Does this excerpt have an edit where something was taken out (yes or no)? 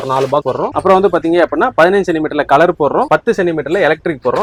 no